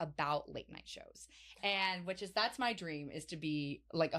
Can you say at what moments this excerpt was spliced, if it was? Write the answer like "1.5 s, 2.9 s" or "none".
none

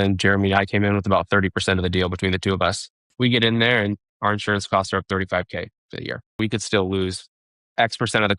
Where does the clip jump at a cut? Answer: 3.0 s, 6.3 s

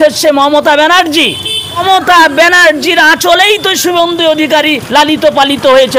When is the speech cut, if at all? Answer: 1.8 s

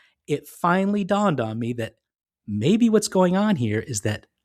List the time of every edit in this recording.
none

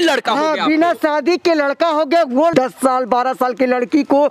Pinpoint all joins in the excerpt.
2.5 s

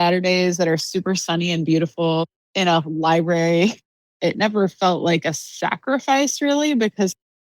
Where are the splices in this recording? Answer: 2.2 s, 3.9 s

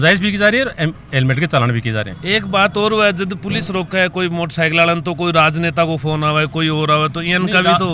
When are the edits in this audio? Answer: 2.1 s

